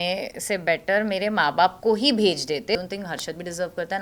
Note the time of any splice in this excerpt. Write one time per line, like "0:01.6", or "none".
0:02.7